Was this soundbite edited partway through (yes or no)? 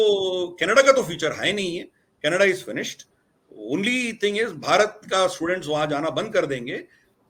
no